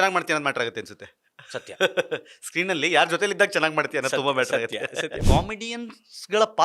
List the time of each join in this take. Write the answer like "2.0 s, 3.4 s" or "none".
5.2 s